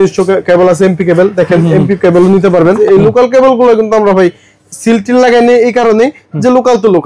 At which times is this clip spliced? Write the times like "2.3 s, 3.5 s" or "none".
2.8 s